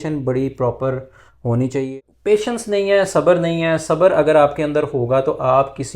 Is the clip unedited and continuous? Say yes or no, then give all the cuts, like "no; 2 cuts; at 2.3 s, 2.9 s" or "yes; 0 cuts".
no; 1 cut; at 1.8 s